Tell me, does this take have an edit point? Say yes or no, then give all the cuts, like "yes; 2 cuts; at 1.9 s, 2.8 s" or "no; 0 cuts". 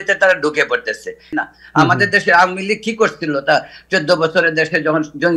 yes; 1 cut; at 1.2 s